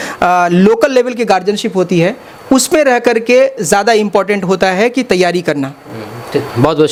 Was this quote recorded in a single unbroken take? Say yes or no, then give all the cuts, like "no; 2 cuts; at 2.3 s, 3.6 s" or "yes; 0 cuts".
yes; 0 cuts